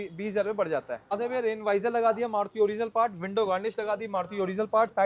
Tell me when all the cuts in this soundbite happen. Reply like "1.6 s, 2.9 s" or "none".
1.1 s